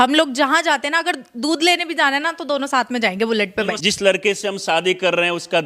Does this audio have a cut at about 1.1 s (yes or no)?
no